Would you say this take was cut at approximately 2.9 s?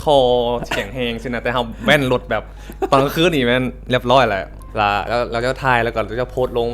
no; 1 cut; at 4.6 s

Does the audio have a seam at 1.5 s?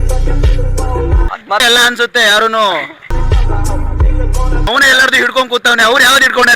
yes; 1 cut; at 1.5 s

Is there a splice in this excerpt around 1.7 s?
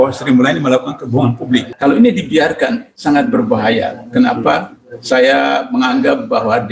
yes; 2 cuts; at 1.7 s, 2.9 s

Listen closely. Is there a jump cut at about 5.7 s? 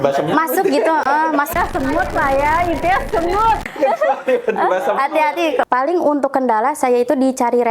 yes; 1 cut; at 5.7 s

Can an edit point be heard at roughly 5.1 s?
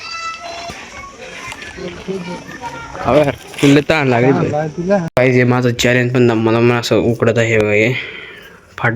yes; 1 cut; at 5.1 s

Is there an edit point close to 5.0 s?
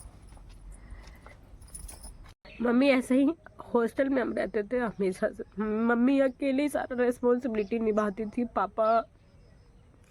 no; 1 cut; at 2.5 s

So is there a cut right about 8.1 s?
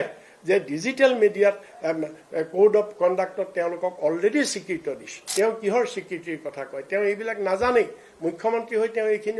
no; 1 cut; at 5.1 s

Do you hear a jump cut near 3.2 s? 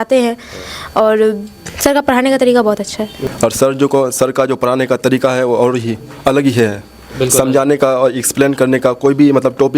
yes; 1 cut; at 3.2 s

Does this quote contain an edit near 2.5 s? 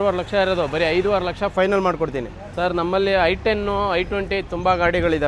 yes; 1 cut; at 2.5 s

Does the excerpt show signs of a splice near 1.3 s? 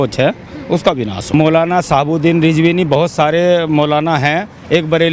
yes; 1 cut; at 1.3 s

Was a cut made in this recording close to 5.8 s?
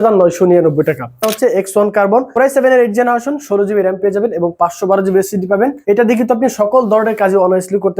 yes; 3 cuts; at 1.3 s, 2.3 s, 5.8 s

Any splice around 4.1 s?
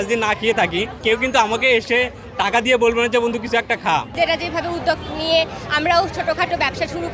yes; 2 cuts; at 0.9 s, 4.1 s

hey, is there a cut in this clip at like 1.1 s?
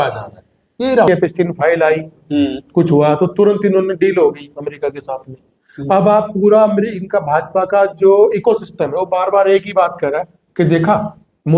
yes; 1 cut; at 1.1 s

